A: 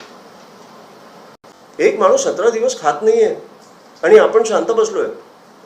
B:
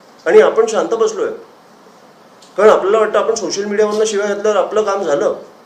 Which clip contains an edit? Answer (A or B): A